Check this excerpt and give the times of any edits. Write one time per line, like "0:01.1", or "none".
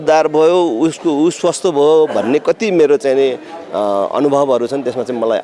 none